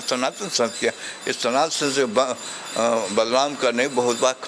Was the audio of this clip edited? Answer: no; 0 cuts

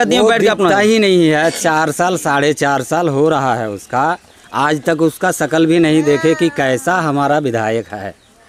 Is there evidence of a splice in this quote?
no; 0 cuts

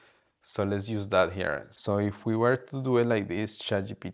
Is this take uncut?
no; 1 cut; at 1.7 s

